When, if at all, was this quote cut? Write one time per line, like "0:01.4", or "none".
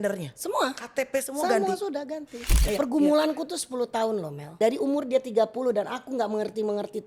0:02.5
0:04.5